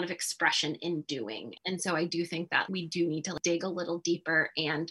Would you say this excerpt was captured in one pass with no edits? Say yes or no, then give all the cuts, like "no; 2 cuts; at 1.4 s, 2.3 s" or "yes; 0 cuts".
no; 1 cut; at 1.6 s